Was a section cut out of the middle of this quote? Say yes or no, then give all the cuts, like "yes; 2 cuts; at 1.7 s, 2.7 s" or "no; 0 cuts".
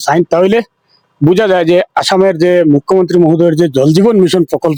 no; 0 cuts